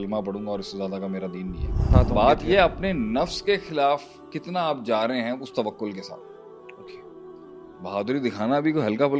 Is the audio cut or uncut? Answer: cut